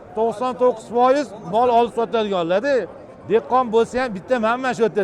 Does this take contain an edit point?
no; 0 cuts

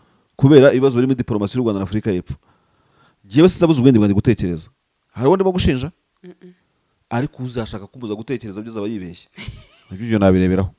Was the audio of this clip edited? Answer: no; 0 cuts

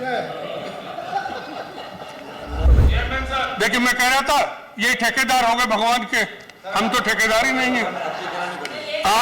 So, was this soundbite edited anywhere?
yes; 1 cut; at 2.7 s

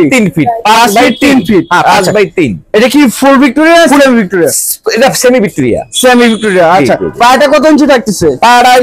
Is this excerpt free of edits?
yes; 0 cuts

